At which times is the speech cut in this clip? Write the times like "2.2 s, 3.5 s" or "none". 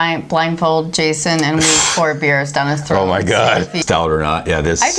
3.8 s